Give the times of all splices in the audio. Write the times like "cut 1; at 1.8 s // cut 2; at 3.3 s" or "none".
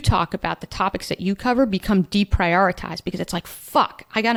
none

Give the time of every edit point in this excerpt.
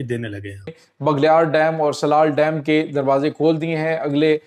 cut 1; at 1.0 s

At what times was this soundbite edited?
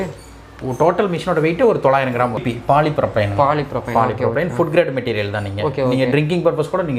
cut 1; at 2.3 s

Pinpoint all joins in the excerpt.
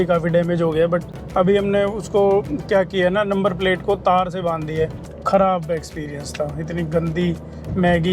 cut 1; at 1.2 s // cut 2; at 5.1 s

